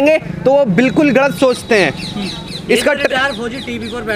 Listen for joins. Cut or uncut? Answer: uncut